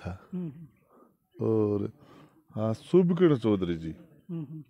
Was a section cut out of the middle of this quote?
no; 0 cuts

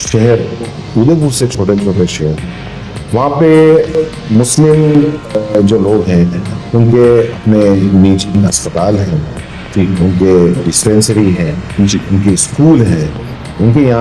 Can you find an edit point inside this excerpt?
no; 0 cuts

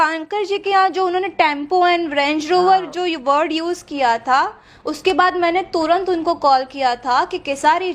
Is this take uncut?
yes; 0 cuts

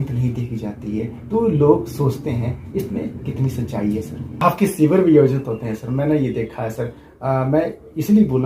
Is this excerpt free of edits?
no; 1 cut; at 4.4 s

